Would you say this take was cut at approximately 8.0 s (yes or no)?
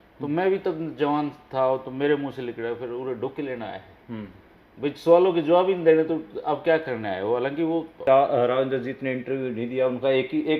yes